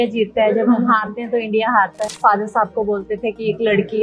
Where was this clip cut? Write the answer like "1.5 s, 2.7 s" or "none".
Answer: 2.1 s